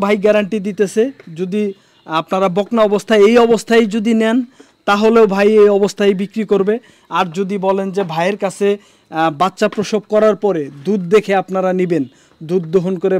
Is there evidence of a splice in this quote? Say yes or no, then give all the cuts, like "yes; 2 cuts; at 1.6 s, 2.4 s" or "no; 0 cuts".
no; 0 cuts